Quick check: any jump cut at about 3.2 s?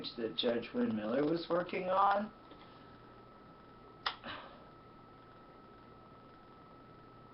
no; 1 cut; at 4.8 s

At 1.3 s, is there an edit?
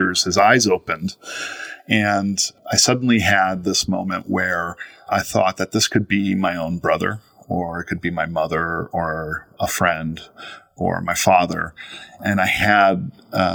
no; 3 cuts; at 2.5 s, 5.1 s, 12.1 s

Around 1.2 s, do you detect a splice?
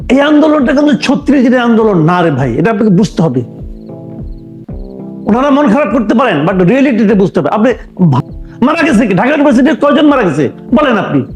no; 3 cuts; at 3.7 s, 5.2 s, 8.2 s

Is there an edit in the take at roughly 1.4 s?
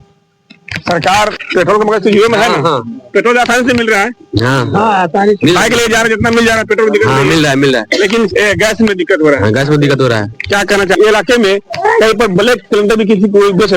yes; 2 cuts; at 1.4 s, 11.0 s

